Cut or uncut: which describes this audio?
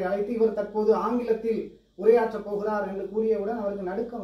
uncut